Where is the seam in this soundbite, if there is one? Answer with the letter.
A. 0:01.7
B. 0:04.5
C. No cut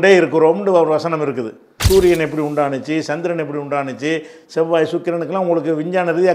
A